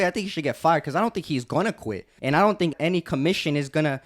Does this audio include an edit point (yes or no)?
yes